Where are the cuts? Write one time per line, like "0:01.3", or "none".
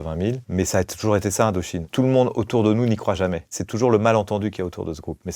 0:01.8
0:03.5

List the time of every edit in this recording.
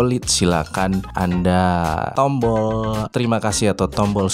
0:01.1
0:02.1
0:03.1

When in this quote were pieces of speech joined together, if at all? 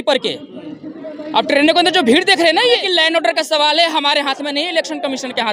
0:02.8

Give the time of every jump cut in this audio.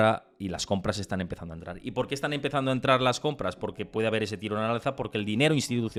none

